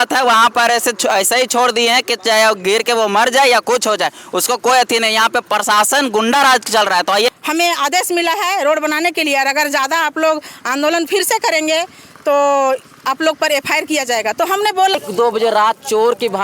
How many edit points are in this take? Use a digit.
2